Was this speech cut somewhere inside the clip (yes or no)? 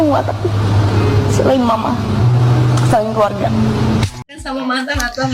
yes